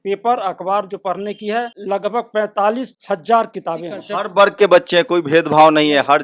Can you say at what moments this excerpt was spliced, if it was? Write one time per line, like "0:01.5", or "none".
0:01.7
0:02.9
0:04.0